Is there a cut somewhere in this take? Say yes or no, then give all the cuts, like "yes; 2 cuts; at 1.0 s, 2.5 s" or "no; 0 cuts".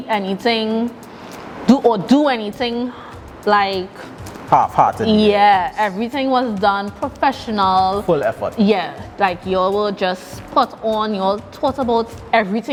no; 0 cuts